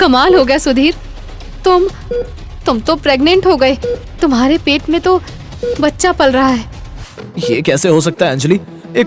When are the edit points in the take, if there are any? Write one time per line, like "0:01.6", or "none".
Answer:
none